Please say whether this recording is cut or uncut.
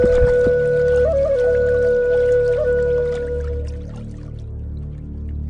uncut